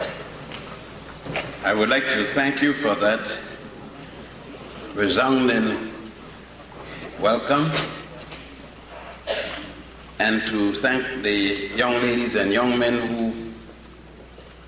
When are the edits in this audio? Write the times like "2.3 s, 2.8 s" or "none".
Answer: 12.6 s